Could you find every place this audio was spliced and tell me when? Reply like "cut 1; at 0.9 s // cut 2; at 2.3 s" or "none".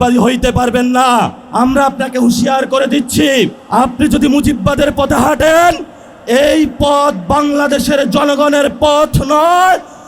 cut 1; at 1.4 s // cut 2; at 3.6 s